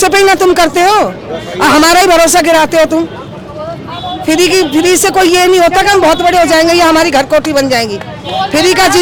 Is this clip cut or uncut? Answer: uncut